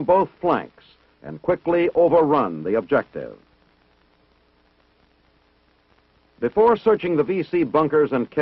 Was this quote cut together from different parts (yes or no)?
no